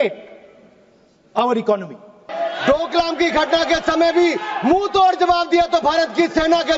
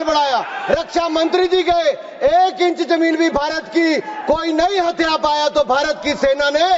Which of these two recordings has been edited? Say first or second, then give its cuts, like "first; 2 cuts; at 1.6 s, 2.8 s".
first; 1 cut; at 2.3 s